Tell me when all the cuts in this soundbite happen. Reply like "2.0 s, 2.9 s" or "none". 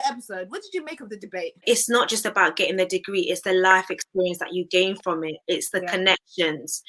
1.6 s